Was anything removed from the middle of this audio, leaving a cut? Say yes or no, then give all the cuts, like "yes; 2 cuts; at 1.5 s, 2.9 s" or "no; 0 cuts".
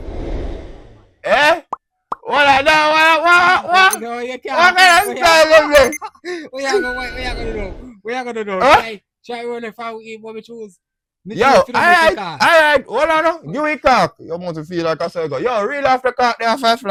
no; 0 cuts